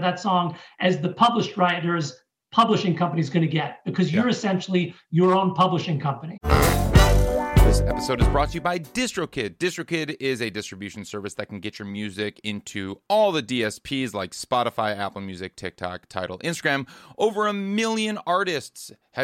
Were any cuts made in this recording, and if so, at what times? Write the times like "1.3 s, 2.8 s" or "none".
6.3 s